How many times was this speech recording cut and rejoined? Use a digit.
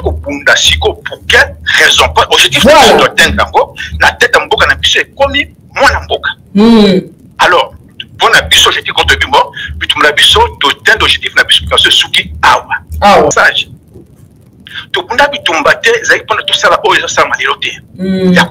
1